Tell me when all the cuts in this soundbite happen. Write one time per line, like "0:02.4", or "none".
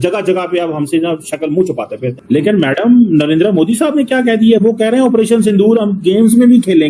0:02.2